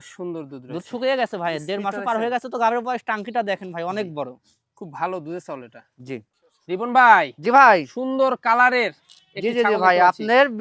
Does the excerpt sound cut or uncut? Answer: uncut